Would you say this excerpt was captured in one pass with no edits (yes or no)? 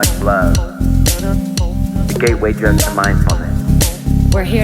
no